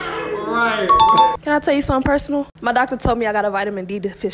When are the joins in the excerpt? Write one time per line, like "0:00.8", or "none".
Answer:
0:01.3
0:02.5